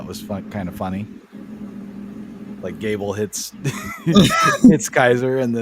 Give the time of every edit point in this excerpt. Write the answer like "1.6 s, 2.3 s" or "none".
none